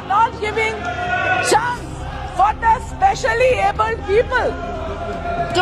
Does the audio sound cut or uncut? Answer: uncut